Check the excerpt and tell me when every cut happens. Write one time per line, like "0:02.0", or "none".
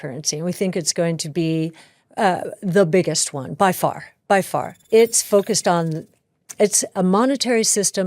0:04.8